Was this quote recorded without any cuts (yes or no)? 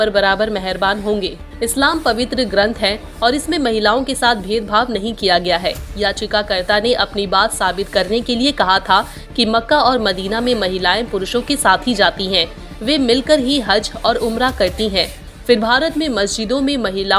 yes